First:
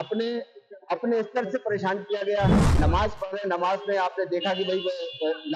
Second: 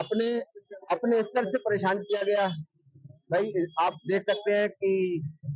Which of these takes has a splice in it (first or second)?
first